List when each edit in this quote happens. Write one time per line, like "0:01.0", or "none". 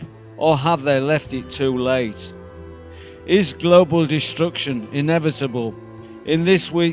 none